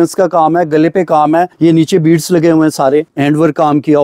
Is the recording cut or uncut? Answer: cut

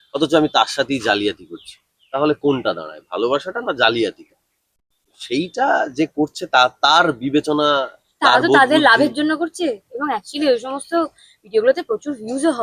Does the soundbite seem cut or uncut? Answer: uncut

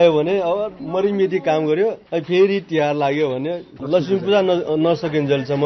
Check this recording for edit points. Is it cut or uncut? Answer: uncut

